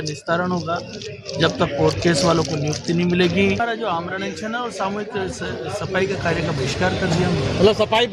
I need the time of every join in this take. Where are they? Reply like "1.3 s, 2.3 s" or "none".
3.6 s

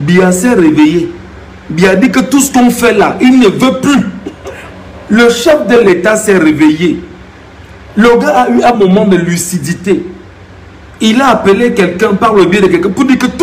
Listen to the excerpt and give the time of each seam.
4.3 s

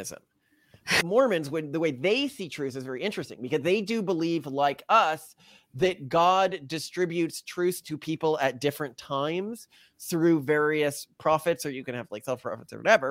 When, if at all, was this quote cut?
1.0 s

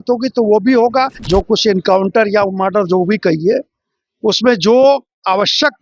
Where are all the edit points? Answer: 1.2 s

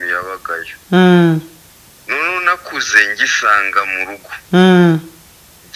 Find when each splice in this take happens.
none

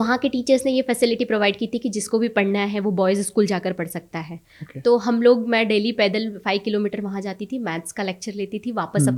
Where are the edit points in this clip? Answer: none

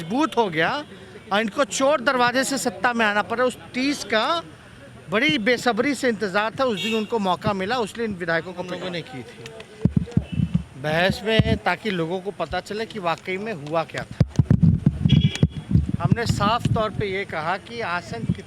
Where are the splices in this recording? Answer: 8.8 s

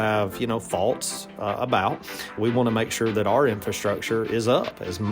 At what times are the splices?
2.4 s

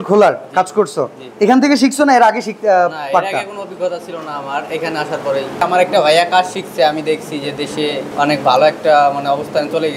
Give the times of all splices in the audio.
5.6 s, 8.1 s

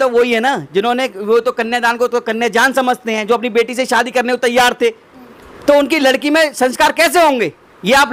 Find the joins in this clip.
none

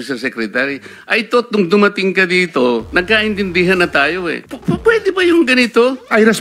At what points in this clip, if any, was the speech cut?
4.4 s

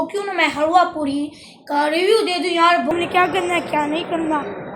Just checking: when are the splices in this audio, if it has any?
2.9 s

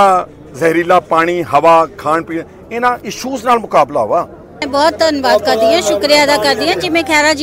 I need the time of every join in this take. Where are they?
4.6 s

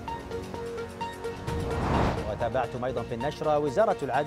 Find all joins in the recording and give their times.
none

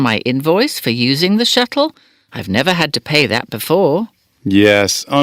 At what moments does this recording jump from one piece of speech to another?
4.3 s

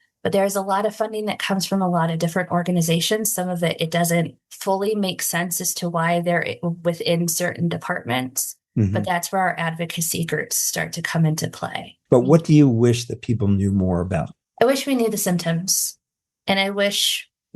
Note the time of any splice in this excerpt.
11.9 s

